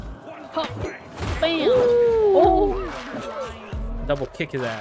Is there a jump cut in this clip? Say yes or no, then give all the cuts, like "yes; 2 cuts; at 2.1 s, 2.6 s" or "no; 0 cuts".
no; 0 cuts